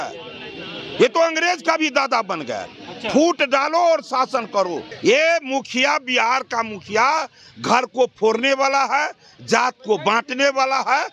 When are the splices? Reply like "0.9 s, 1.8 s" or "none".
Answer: 4.9 s